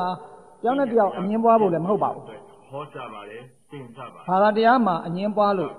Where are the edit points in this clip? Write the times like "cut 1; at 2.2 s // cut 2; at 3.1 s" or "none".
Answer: cut 1; at 2.2 s // cut 2; at 3.7 s